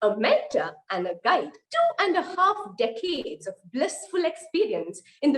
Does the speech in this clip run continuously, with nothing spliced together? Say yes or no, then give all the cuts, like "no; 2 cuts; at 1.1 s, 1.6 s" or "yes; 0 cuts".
no; 1 cut; at 1.6 s